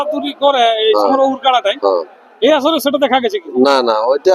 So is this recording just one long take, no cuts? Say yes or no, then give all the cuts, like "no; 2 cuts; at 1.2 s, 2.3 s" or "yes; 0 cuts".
yes; 0 cuts